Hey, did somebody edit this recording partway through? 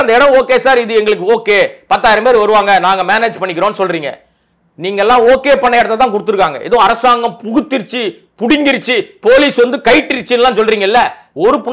no; 0 cuts

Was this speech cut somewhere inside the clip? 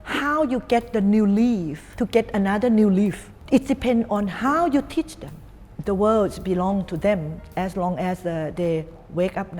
yes; 3 cuts; at 1.9 s, 3.3 s, 5.7 s

